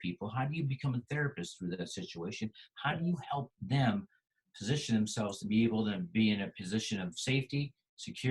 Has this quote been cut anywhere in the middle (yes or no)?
no